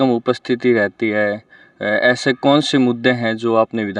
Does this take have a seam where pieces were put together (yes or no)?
no